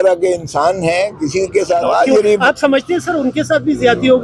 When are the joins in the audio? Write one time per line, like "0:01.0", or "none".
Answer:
0:01.8